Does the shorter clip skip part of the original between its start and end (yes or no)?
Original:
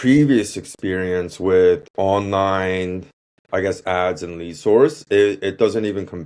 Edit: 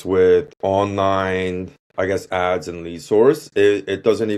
yes